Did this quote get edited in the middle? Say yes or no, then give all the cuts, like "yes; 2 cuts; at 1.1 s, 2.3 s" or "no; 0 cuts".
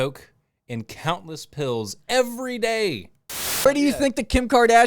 yes; 1 cut; at 3.7 s